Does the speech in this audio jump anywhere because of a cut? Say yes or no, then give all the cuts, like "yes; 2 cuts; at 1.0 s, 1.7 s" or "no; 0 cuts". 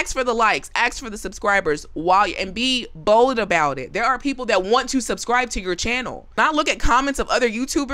no; 0 cuts